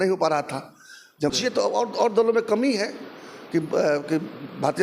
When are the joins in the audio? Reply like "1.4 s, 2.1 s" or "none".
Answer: 1.3 s